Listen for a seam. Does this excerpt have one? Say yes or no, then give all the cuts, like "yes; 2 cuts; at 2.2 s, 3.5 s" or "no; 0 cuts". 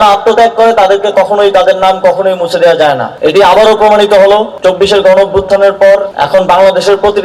no; 0 cuts